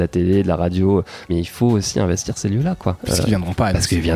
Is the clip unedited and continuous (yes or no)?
no